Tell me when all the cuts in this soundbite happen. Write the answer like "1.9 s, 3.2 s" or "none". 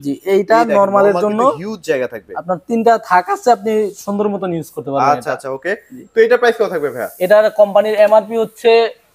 none